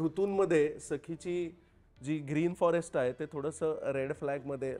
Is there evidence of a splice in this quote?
no; 0 cuts

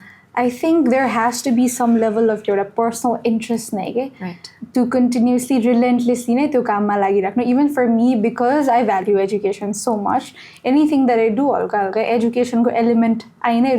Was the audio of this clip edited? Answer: no; 0 cuts

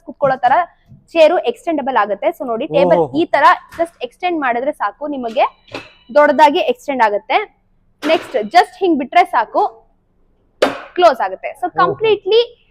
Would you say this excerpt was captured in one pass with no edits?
yes; 0 cuts

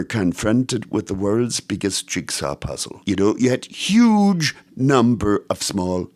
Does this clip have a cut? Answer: yes; 1 cut; at 2.9 s

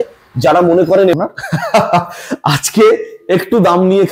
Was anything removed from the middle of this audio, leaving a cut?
yes; 1 cut; at 1.1 s

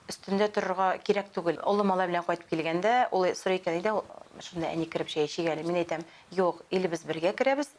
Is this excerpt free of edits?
no; 1 cut; at 1.6 s

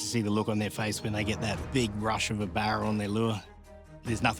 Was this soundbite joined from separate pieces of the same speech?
yes; 1 cut; at 3.5 s

